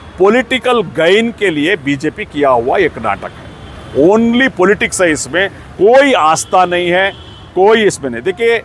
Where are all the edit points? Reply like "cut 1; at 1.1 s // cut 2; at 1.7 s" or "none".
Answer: none